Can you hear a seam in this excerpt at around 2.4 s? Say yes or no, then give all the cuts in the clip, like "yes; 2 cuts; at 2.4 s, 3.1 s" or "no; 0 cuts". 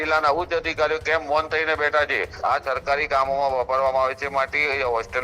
yes; 1 cut; at 2.4 s